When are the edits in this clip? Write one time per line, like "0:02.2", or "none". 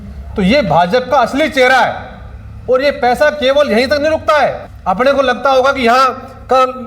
0:04.7